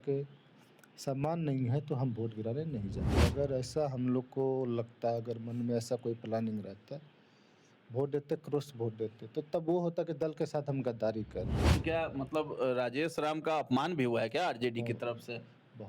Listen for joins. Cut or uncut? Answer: cut